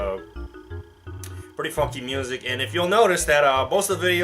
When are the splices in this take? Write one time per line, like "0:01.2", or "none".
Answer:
0:01.4